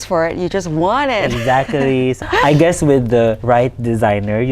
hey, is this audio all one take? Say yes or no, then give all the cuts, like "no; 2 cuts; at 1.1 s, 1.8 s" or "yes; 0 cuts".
no; 2 cuts; at 2.2 s, 3.4 s